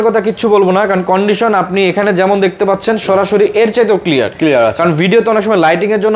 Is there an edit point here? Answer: no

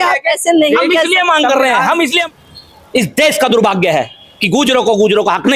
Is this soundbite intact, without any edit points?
no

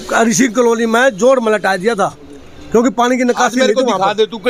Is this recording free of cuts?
yes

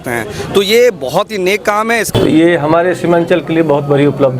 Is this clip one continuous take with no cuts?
no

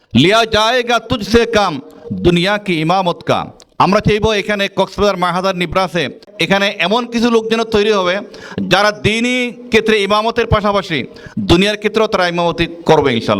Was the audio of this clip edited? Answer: yes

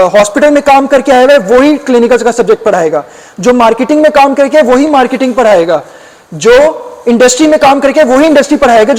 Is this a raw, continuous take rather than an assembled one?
yes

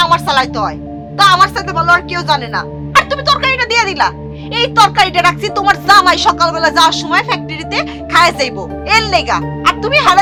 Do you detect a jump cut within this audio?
no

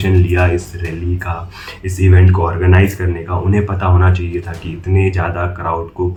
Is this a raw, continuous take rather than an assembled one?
yes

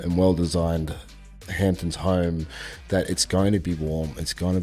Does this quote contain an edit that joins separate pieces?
no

